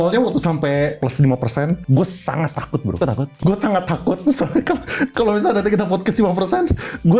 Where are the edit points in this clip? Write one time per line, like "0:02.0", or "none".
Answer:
0:01.0
0:01.8
0:03.4